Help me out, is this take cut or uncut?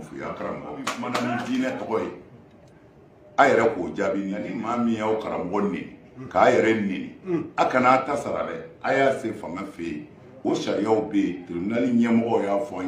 cut